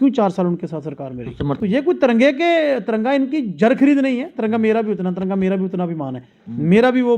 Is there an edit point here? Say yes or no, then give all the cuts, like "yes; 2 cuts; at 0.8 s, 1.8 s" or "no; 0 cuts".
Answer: yes; 1 cut; at 1.5 s